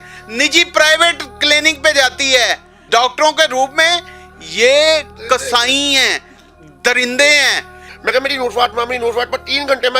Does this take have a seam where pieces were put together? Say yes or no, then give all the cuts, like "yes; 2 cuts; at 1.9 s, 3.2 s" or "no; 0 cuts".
yes; 2 cuts; at 2.8 s, 7.9 s